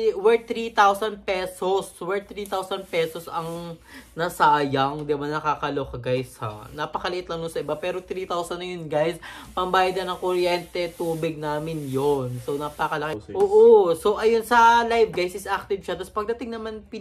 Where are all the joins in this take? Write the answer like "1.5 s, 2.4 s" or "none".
13.2 s

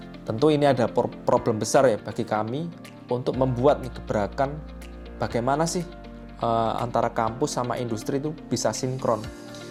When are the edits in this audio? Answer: none

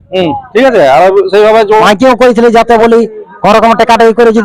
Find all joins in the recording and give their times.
1.8 s

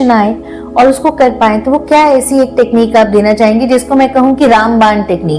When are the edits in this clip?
none

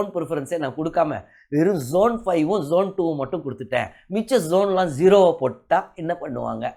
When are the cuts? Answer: none

